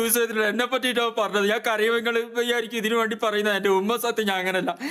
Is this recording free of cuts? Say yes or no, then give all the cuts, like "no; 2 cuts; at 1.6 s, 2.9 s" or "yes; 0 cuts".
yes; 0 cuts